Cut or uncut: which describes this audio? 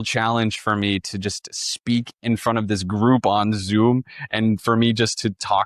uncut